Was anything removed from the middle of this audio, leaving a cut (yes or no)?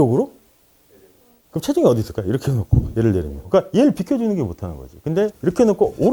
no